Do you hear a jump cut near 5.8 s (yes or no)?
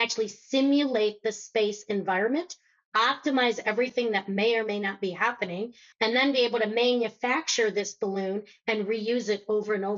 yes